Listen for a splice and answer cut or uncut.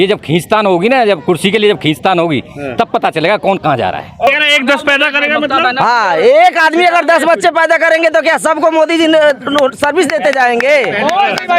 cut